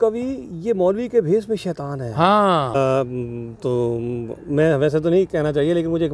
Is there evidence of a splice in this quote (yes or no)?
yes